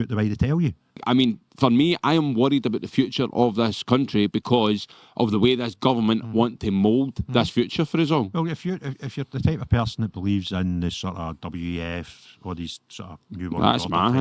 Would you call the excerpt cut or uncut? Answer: cut